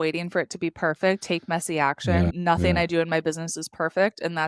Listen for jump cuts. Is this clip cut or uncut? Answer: cut